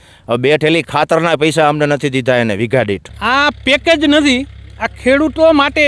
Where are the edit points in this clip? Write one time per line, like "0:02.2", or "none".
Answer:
0:03.1